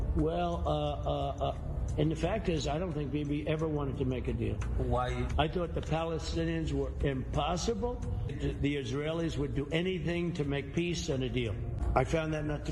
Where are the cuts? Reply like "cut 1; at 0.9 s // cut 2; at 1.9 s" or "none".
cut 1; at 8.4 s // cut 2; at 11.8 s